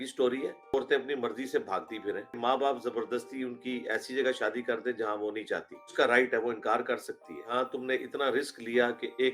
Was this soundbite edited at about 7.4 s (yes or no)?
yes